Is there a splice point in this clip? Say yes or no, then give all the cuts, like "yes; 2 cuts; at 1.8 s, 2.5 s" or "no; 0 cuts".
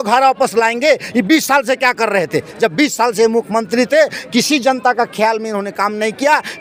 no; 0 cuts